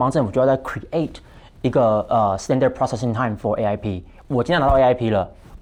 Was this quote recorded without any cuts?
yes; 0 cuts

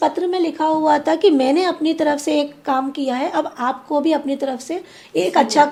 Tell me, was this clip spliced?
no; 0 cuts

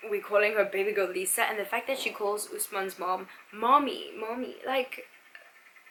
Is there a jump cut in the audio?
no; 0 cuts

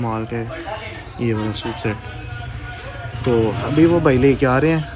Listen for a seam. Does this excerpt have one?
no; 0 cuts

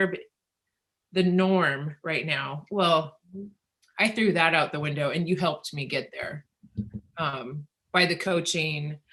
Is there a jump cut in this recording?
no; 0 cuts

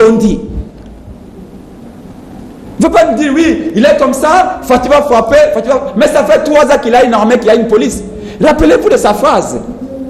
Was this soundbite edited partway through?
no; 0 cuts

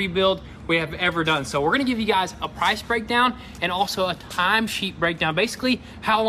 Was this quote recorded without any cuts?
yes; 0 cuts

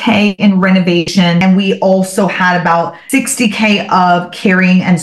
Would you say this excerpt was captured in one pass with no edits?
no; 2 cuts; at 1.2 s, 3.0 s

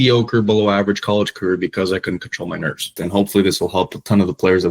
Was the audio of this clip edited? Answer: yes; 1 cut; at 3.0 s

